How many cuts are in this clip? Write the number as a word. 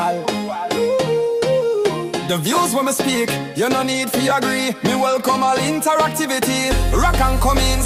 zero